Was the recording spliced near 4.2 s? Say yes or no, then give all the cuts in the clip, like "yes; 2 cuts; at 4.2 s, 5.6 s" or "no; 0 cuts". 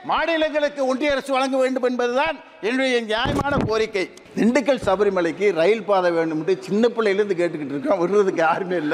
yes; 1 cut; at 4.2 s